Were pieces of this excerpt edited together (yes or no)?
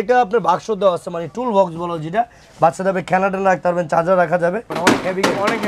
yes